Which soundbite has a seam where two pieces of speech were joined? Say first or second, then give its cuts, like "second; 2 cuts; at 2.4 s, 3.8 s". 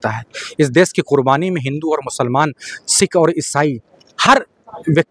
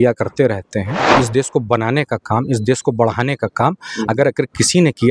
second; 1 cut; at 1.1 s